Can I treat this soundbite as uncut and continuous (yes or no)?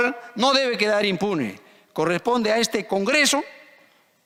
yes